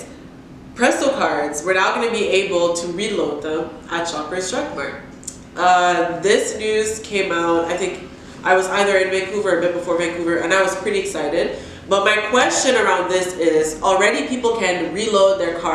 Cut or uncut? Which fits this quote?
uncut